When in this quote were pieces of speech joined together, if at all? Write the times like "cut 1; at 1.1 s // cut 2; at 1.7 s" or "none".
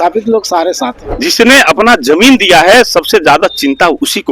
cut 1; at 1.0 s

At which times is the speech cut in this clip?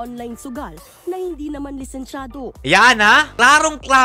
none

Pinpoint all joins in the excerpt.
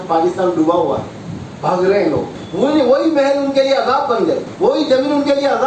cut 1; at 2.4 s // cut 2; at 4.5 s

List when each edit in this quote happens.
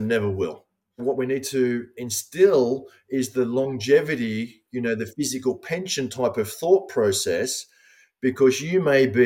cut 1; at 1.0 s

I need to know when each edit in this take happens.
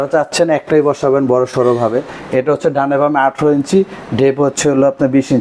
none

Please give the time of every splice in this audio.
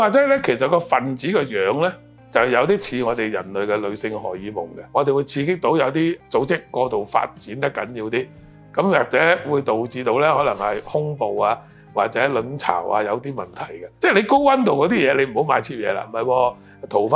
cut 1; at 4.8 s // cut 2; at 6.2 s // cut 3; at 13.8 s // cut 4; at 16.1 s

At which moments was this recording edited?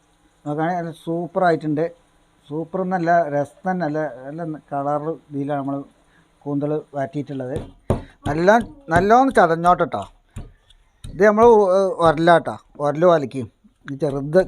cut 1; at 7.7 s

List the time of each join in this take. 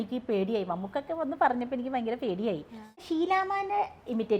cut 1; at 3.0 s

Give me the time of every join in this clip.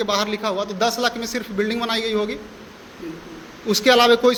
none

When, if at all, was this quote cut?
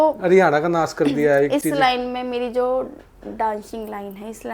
none

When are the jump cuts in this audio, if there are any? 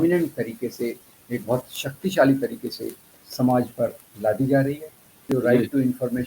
cut 1; at 5.3 s

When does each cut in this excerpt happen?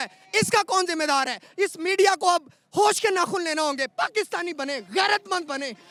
none

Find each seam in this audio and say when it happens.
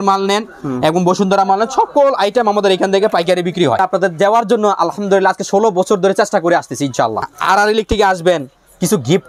cut 1; at 3.8 s // cut 2; at 7.3 s

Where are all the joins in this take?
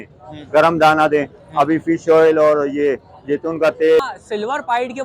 cut 1; at 4.0 s

